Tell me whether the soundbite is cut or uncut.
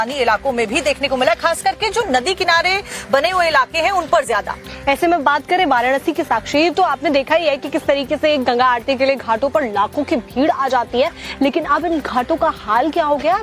uncut